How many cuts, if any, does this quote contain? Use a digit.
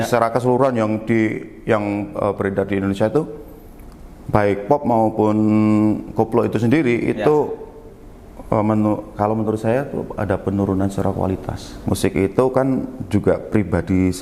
1